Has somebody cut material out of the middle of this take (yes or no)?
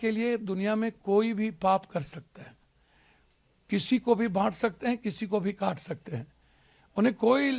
no